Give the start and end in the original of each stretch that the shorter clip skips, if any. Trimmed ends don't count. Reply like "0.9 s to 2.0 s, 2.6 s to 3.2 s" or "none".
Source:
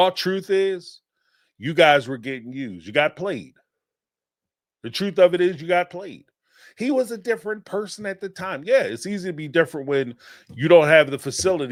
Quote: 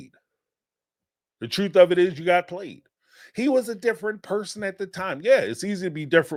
none